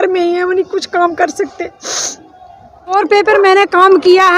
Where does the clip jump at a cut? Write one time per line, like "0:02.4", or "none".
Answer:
0:02.9